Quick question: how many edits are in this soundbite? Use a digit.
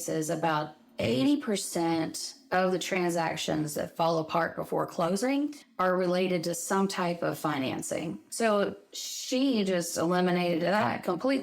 1